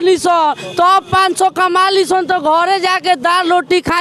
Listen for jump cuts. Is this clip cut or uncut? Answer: uncut